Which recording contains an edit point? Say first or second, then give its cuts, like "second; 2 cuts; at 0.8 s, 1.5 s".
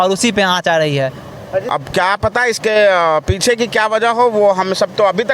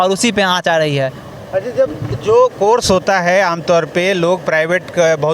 first; 1 cut; at 1.7 s